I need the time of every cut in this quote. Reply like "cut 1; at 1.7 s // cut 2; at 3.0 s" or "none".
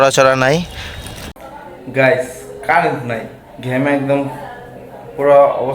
cut 1; at 1.4 s